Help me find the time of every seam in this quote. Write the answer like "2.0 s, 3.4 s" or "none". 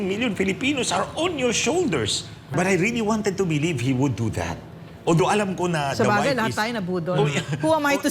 2.5 s